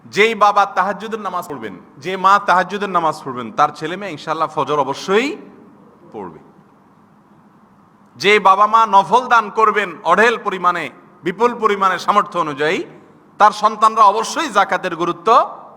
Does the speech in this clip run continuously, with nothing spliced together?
no; 1 cut; at 1.5 s

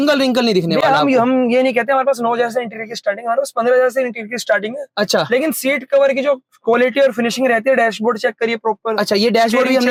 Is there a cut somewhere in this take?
no; 0 cuts

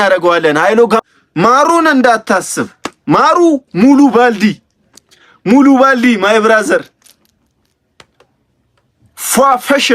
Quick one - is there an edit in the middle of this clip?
yes; 1 cut; at 1.2 s

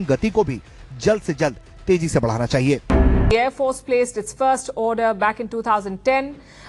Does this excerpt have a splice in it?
yes; 1 cut; at 3.3 s

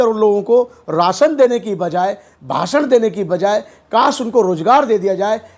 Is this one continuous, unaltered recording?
yes; 0 cuts

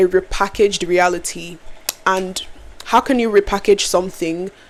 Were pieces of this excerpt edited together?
no; 0 cuts

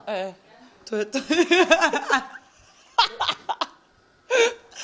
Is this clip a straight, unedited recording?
yes; 0 cuts

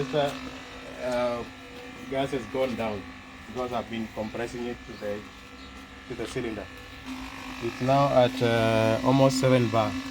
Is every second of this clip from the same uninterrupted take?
no; 1 cut; at 7.0 s

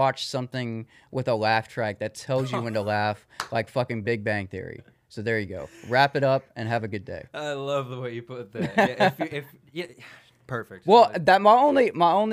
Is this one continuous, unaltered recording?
yes; 0 cuts

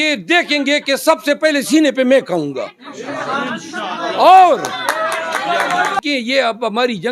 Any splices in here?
yes; 1 cut; at 6.0 s

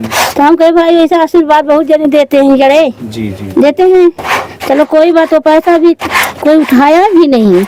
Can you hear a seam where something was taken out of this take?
no; 0 cuts

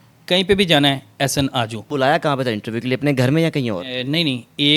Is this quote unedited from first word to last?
no; 1 cut; at 1.8 s

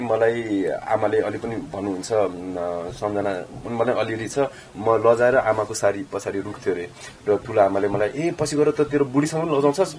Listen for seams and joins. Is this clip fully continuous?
yes; 0 cuts

